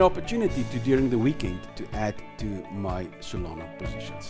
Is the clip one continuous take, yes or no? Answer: yes